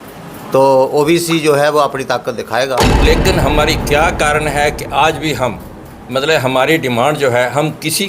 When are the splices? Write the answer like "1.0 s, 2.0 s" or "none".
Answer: 2.9 s

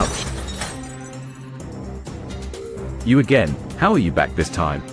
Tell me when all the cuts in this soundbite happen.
none

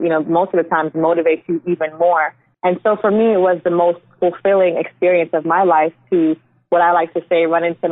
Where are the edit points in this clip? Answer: 2.4 s

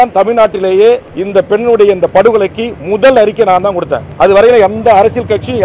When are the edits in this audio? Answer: 1.1 s, 4.0 s

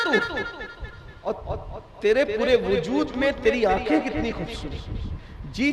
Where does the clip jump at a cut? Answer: 1.3 s

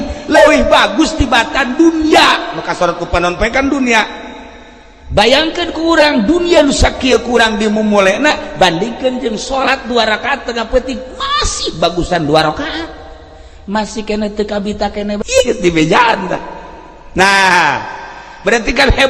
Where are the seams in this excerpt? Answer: 15.4 s

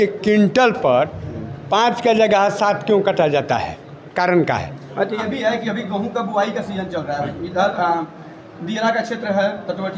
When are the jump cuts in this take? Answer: 5.1 s

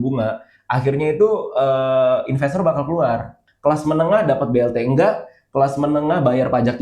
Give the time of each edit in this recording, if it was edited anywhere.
3.4 s

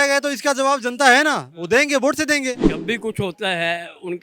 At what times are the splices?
2.7 s

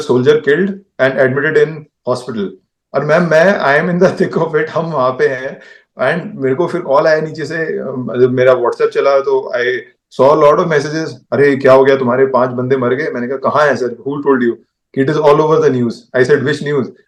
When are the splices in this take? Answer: none

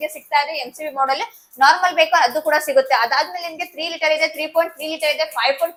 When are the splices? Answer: none

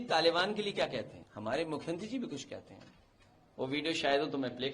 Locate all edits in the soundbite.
1.2 s

